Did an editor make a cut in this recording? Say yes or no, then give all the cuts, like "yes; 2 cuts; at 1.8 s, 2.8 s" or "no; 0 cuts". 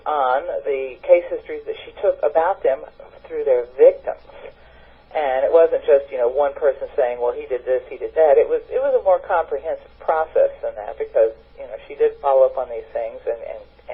no; 0 cuts